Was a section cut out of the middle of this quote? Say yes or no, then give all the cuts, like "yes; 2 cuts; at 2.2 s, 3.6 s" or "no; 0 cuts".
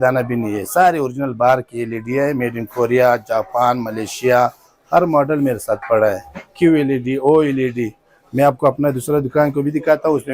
no; 0 cuts